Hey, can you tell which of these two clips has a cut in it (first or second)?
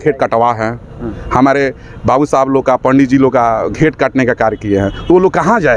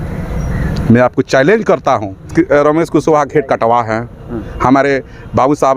second